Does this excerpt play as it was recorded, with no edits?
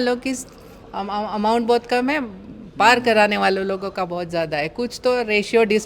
yes; 0 cuts

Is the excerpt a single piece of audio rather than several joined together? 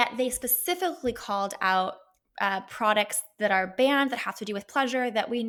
yes; 0 cuts

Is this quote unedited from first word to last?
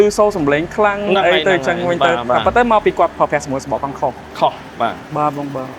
yes; 0 cuts

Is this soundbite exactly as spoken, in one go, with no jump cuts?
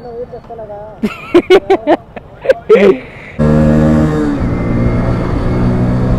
no; 1 cut; at 3.4 s

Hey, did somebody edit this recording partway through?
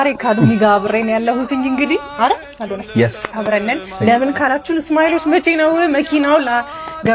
no; 0 cuts

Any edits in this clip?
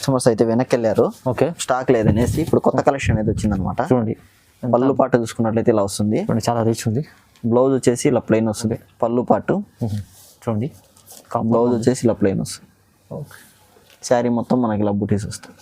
yes; 1 cut; at 8.6 s

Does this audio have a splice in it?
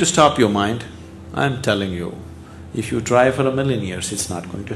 no; 0 cuts

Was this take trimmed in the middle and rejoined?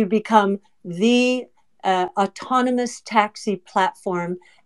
no; 0 cuts

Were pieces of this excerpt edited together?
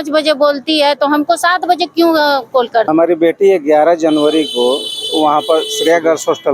yes; 1 cut; at 2.9 s

